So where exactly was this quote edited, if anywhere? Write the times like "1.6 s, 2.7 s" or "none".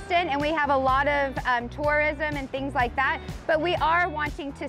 none